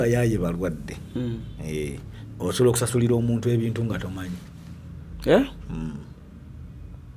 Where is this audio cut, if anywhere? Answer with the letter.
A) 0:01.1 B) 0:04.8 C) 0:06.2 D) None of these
D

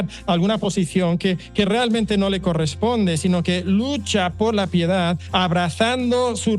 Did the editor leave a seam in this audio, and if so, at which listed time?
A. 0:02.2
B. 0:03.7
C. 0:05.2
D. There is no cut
C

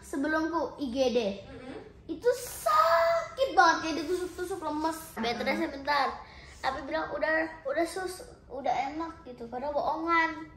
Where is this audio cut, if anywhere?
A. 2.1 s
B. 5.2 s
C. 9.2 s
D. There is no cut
B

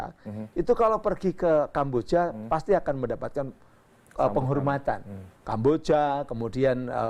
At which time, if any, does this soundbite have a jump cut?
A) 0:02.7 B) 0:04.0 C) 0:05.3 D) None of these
D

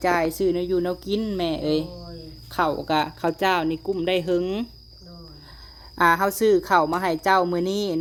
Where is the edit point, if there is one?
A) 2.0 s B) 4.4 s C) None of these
C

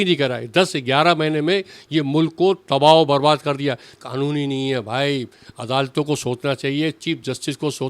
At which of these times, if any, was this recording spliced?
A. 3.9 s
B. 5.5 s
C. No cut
A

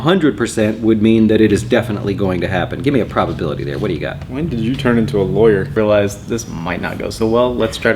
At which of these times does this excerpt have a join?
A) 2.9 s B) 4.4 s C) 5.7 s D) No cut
C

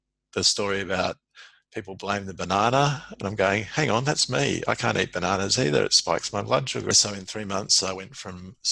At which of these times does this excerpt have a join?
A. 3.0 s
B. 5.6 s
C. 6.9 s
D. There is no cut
C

